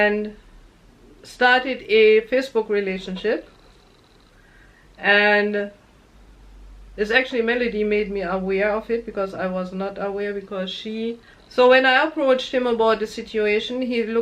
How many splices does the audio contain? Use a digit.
1